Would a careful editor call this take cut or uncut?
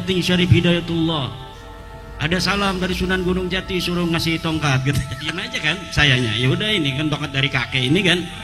cut